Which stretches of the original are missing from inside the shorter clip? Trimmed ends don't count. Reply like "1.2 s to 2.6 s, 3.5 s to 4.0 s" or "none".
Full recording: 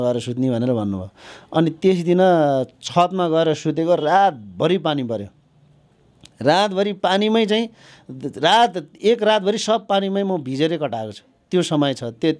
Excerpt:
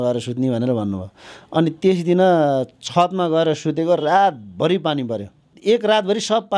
5.5 s to 8.9 s